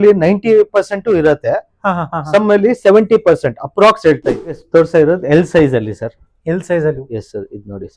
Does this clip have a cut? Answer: yes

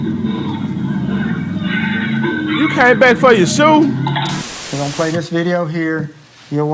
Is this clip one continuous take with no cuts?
no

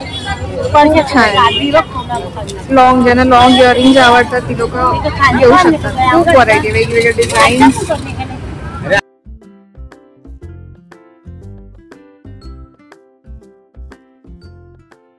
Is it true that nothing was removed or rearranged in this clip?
yes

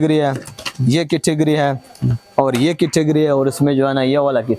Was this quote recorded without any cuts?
yes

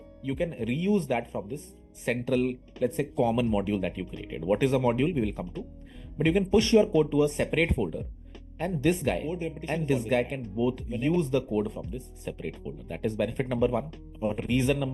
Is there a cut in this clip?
yes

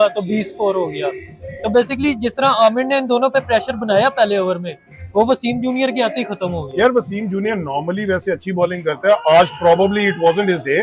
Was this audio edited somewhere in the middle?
no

